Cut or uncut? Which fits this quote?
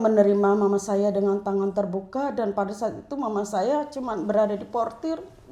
uncut